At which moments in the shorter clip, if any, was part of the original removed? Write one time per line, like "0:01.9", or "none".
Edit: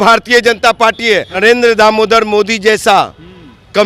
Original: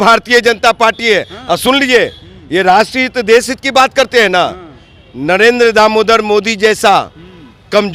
0:01.3

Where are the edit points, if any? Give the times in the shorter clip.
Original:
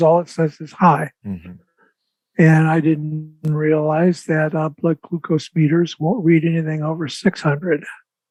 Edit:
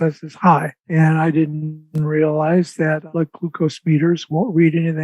0:01.0
0:03.0

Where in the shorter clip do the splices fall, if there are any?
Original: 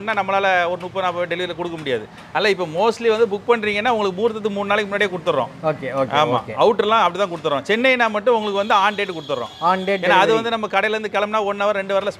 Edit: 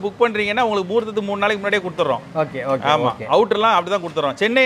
none

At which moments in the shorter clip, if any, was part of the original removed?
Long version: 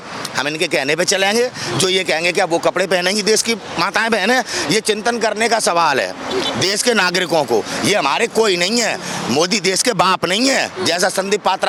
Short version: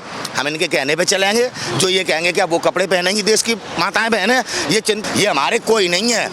0:05.0

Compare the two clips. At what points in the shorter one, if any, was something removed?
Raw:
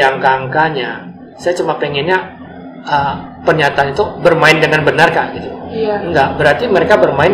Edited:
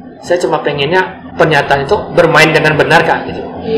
0:01.2

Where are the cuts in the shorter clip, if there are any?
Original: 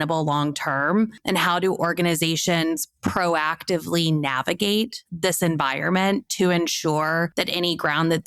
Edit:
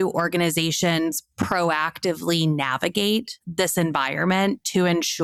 none

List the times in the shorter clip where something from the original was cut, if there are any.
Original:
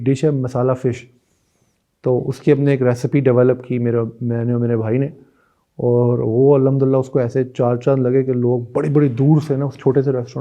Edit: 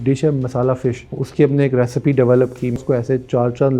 0:01.2
0:02.8

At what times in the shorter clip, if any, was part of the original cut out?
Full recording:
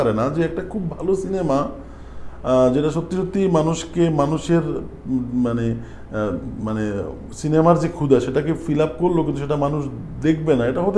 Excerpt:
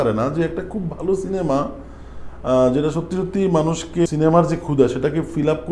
0:04.1

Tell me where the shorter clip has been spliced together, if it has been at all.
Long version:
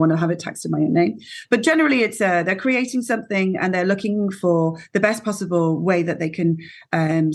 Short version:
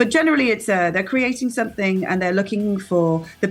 none

